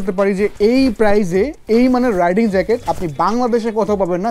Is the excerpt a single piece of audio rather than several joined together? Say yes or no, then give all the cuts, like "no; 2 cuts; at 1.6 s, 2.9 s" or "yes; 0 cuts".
yes; 0 cuts